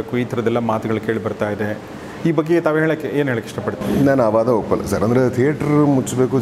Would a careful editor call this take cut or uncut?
uncut